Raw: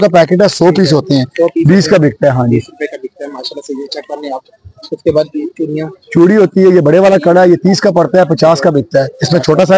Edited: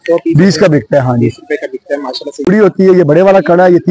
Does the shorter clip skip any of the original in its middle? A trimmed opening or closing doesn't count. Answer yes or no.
yes